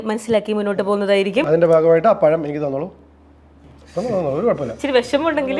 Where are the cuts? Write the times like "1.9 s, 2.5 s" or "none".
none